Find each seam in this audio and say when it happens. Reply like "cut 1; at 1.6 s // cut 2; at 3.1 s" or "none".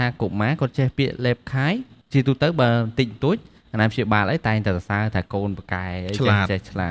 cut 1; at 1.9 s